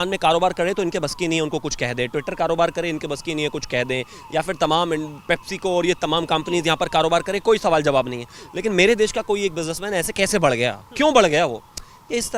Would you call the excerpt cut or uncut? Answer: uncut